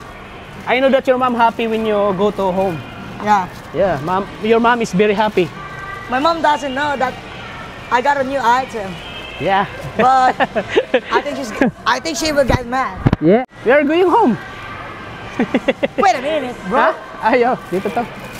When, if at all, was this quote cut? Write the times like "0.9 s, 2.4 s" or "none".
13.4 s